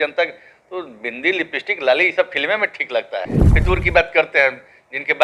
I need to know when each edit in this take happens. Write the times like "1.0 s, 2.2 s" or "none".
3.4 s